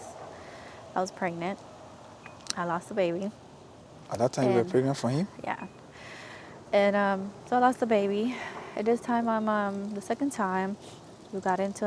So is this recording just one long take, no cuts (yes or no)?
yes